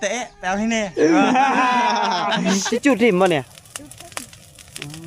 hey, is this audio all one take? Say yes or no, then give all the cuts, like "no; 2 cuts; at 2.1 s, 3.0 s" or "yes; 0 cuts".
no; 1 cut; at 2.7 s